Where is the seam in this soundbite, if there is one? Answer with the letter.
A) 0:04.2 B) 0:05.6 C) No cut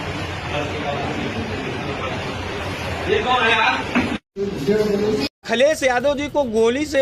B